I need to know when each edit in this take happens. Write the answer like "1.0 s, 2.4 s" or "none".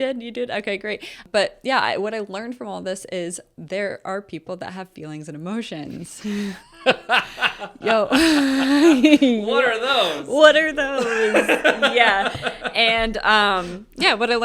1.2 s